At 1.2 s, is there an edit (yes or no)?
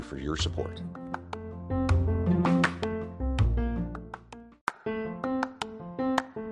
no